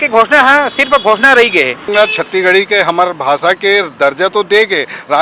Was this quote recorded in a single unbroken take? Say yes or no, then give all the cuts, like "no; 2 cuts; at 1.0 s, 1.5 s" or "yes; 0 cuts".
no; 1 cut; at 1.9 s